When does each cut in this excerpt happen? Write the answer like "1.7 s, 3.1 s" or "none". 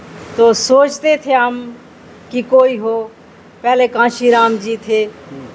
none